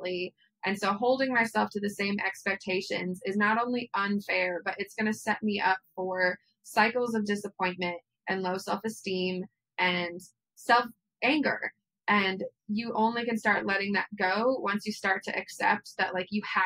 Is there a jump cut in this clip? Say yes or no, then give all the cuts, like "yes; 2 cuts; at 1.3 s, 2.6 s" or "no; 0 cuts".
no; 0 cuts